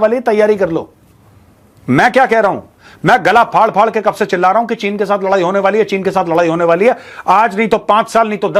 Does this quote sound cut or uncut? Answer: uncut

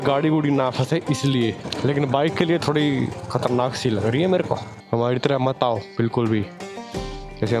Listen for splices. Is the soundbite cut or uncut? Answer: cut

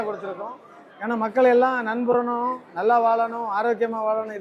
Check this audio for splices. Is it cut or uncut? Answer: uncut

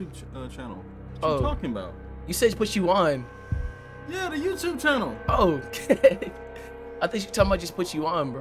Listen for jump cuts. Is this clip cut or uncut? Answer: uncut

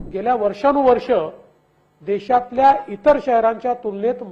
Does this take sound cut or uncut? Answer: uncut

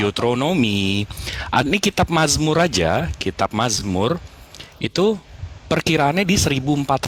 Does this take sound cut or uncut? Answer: uncut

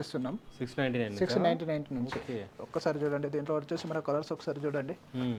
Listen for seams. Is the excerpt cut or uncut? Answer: uncut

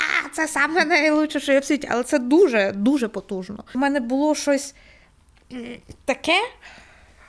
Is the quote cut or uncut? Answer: cut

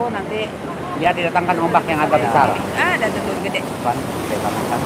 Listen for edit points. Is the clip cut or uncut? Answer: uncut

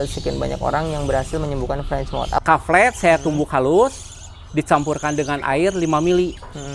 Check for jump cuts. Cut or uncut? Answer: cut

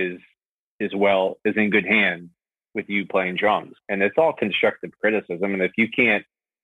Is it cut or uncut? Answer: cut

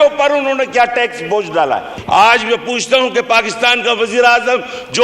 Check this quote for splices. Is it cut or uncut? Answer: cut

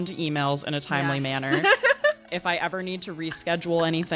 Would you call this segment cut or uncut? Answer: uncut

